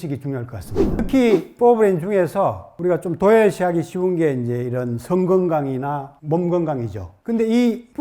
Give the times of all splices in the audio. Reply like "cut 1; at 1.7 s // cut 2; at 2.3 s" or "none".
cut 1; at 1.0 s